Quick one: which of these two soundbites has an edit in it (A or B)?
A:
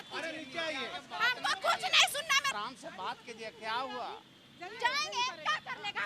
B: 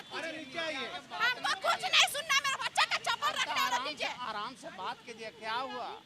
A